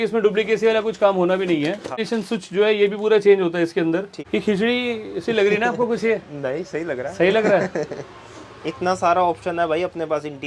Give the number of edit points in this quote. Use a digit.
2